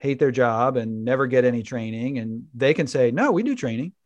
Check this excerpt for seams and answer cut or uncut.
uncut